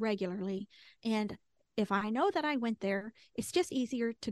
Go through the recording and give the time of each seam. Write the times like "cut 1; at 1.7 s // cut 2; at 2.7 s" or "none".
none